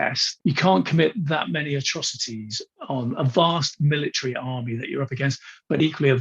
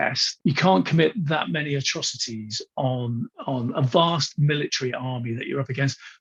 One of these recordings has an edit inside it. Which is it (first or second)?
first